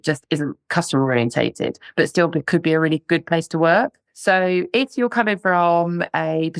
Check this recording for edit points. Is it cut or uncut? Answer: uncut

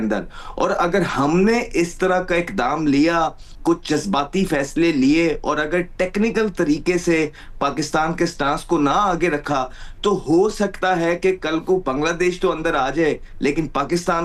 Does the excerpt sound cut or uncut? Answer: uncut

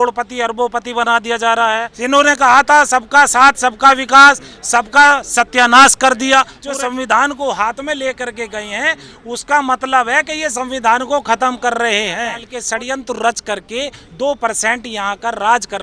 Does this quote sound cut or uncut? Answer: cut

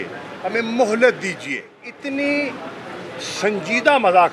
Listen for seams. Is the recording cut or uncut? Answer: cut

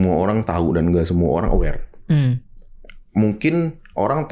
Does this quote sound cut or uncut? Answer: uncut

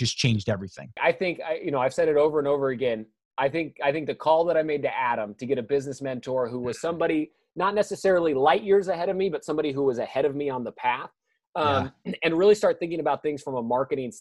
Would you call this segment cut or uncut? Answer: cut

